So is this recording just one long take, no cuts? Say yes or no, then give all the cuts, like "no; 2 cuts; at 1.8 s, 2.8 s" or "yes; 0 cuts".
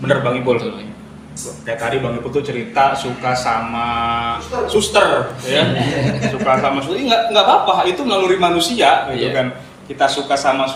yes; 0 cuts